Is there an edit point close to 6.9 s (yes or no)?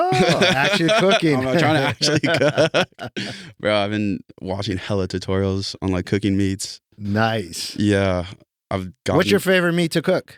no